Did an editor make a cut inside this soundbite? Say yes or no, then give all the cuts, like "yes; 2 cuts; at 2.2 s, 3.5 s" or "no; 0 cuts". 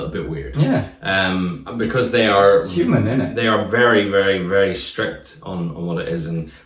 no; 0 cuts